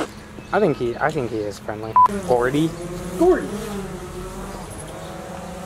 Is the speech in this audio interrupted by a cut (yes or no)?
no